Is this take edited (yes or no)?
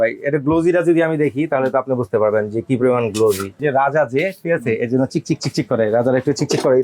yes